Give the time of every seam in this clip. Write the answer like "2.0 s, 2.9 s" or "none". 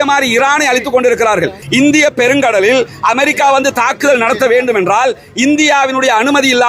1.6 s

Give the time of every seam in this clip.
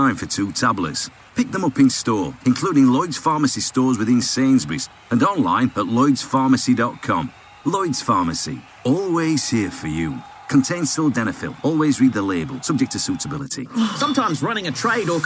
13.6 s

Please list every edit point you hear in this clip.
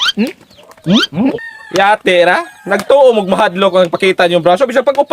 1.4 s

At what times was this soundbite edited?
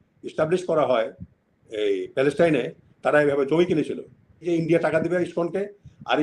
4.4 s

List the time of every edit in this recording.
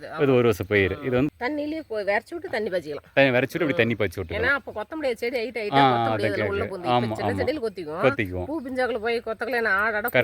1.3 s

